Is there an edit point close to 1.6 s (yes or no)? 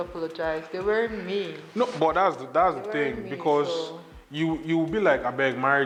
no